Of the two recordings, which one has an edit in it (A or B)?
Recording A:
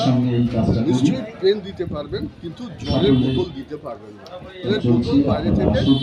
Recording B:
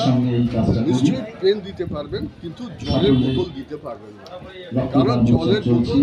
A